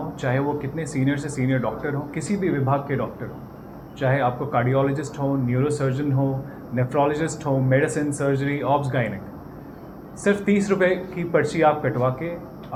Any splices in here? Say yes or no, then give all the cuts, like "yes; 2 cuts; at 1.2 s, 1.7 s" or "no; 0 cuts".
no; 0 cuts